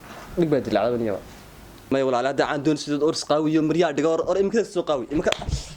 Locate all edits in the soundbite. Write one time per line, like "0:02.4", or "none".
0:01.9